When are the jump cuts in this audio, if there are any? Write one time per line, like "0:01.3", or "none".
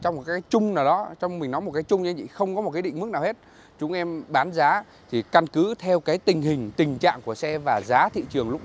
none